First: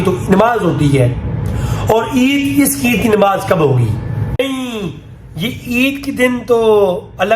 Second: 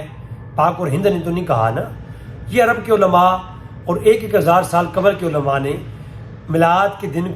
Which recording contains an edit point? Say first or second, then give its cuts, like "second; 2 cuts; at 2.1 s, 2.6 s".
first; 1 cut; at 4.4 s